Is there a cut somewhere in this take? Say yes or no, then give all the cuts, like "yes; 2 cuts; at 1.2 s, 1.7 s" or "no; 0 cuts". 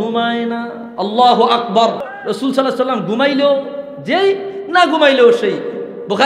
yes; 1 cut; at 2.0 s